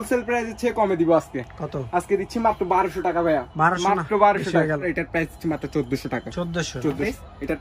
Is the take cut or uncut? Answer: uncut